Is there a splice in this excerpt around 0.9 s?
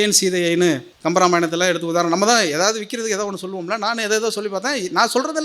yes; 1 cut; at 0.9 s

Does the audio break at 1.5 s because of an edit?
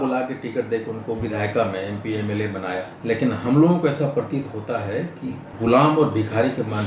no; 2 cuts; at 2.9 s, 5.5 s

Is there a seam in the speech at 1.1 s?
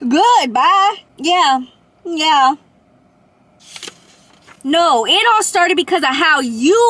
yes; 2 cuts; at 1.1 s, 4.5 s

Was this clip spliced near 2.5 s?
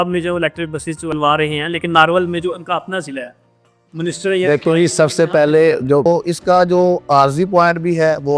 no; 2 cuts; at 1.1 s, 6.1 s

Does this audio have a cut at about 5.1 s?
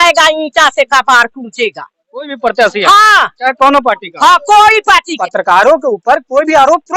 yes; 1 cut; at 5.1 s

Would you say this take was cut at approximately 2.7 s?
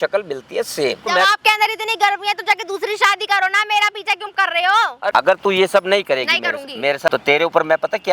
no; 3 cuts; at 1.1 s, 5.1 s, 7.1 s

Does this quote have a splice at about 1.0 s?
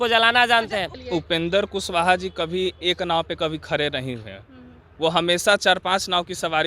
yes; 1 cut; at 1.0 s

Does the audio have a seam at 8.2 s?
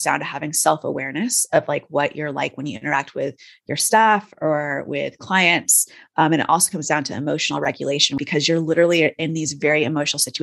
yes; 1 cut; at 8.2 s

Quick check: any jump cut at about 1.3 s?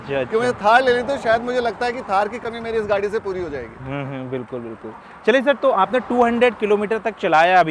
no; 0 cuts

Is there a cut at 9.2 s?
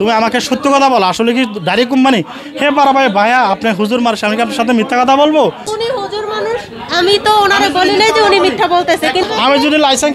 yes; 2 cuts; at 5.7 s, 9.2 s

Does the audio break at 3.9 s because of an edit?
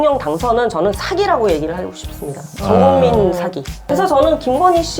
yes; 1 cut; at 3.9 s

